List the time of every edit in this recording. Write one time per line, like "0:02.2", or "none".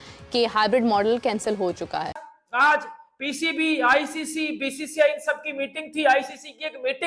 0:02.2